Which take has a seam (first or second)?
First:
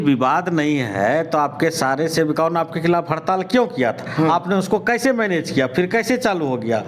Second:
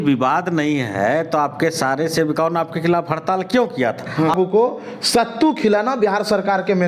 second